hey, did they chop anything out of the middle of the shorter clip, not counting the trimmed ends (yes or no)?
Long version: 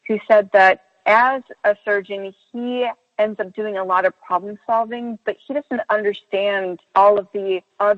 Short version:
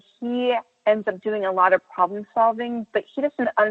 no